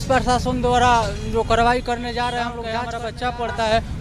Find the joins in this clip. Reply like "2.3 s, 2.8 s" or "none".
2.6 s